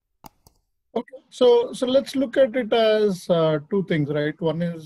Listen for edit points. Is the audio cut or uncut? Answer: uncut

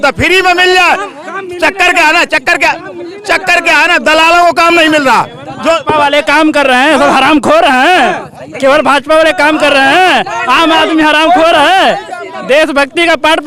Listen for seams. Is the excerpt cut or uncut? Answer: uncut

